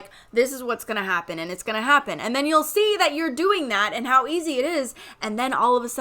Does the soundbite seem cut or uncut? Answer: uncut